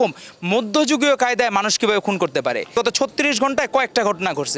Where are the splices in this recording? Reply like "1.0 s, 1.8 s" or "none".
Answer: none